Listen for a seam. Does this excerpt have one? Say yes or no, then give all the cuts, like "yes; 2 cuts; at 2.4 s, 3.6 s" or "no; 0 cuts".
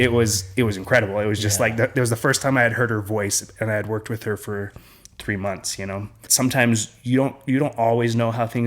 yes; 1 cut; at 6.2 s